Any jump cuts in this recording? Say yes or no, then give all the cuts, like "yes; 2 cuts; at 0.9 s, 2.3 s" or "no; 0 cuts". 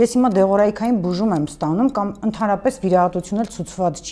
no; 0 cuts